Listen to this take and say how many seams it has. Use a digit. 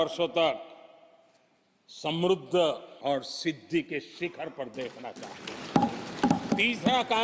2